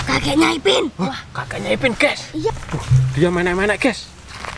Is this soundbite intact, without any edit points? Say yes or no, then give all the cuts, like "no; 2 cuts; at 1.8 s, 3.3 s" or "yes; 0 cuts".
no; 1 cut; at 2.5 s